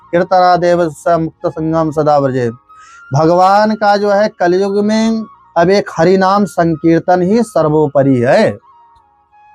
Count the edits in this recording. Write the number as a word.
zero